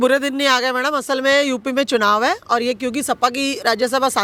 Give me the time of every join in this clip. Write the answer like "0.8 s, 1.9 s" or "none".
none